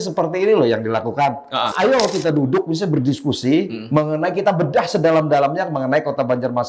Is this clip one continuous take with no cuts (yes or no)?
no